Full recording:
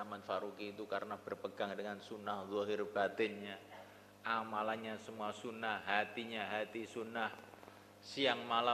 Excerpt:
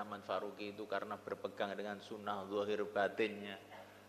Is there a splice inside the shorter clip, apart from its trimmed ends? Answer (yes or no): no